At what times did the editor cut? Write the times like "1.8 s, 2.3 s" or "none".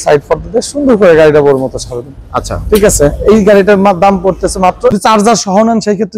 5.0 s